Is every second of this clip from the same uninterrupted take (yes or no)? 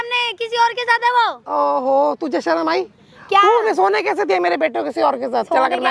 yes